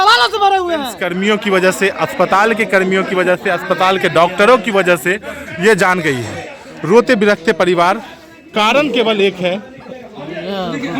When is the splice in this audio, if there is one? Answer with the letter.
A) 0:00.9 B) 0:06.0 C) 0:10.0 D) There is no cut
A